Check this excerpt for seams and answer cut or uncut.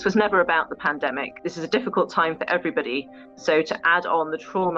uncut